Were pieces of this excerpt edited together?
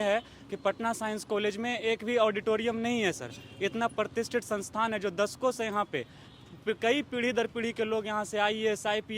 no; 0 cuts

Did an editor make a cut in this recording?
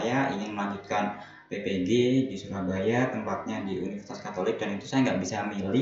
no; 0 cuts

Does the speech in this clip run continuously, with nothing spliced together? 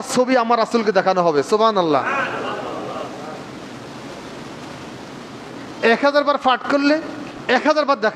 yes; 0 cuts

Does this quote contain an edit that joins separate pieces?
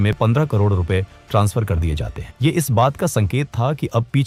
no; 0 cuts

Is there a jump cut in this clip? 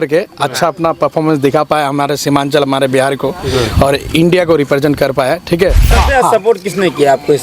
yes; 1 cut; at 5.9 s

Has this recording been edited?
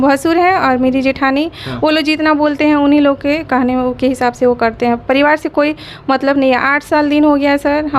no; 0 cuts

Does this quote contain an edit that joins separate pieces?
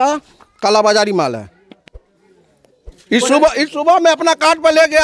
no; 0 cuts

